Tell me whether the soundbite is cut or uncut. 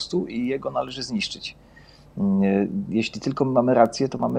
uncut